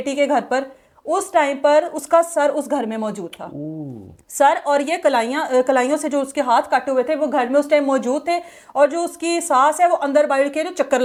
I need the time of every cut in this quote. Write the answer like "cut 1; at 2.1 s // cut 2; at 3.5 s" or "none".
none